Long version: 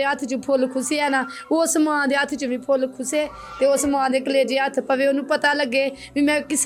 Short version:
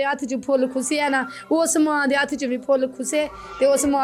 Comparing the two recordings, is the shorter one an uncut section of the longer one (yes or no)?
yes